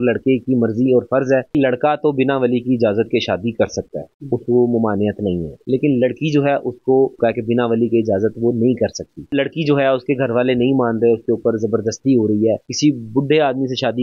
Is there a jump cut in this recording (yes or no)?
yes